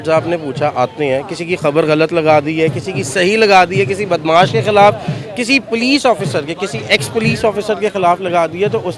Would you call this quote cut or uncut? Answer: uncut